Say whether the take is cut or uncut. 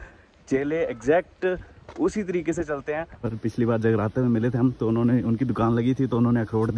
cut